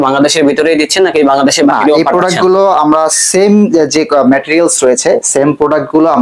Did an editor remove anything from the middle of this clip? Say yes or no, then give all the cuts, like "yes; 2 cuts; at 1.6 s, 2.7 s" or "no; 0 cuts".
no; 0 cuts